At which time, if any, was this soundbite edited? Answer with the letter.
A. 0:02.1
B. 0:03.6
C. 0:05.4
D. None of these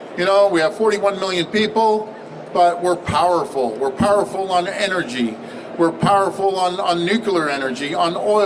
D